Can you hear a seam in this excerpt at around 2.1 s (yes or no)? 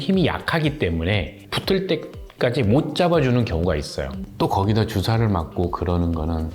no